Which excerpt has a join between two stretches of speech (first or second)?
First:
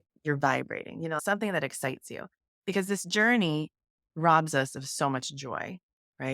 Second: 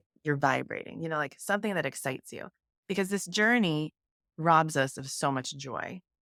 first